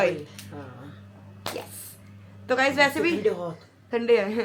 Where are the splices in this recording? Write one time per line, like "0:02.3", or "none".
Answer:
none